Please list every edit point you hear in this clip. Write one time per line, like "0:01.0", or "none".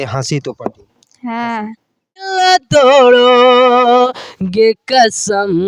0:02.2